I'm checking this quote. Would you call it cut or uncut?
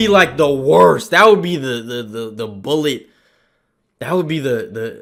uncut